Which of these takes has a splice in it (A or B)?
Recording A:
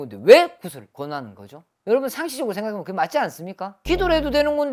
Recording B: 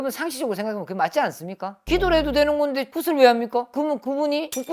B